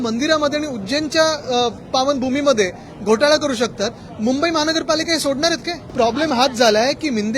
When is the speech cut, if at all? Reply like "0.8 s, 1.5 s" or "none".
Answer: 5.8 s